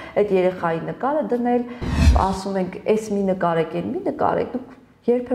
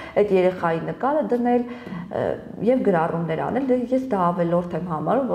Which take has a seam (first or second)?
first